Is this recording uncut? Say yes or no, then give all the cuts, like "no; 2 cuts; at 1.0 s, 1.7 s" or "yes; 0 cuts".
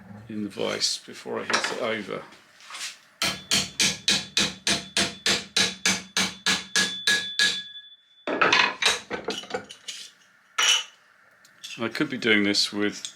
yes; 0 cuts